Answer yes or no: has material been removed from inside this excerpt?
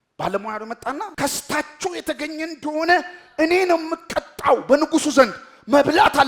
yes